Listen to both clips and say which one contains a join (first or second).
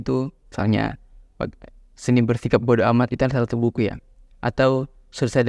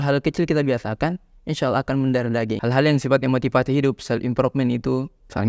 second